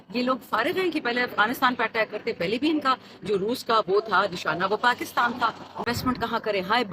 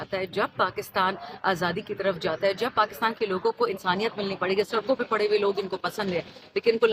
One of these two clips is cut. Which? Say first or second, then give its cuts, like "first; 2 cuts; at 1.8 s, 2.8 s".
first; 1 cut; at 5.9 s